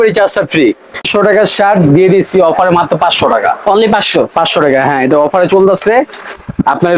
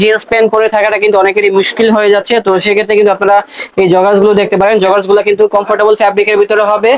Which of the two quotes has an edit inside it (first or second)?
first